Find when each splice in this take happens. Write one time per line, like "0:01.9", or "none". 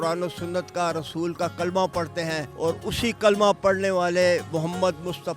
0:02.5
0:04.5